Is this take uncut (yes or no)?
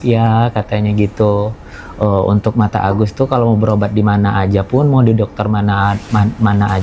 yes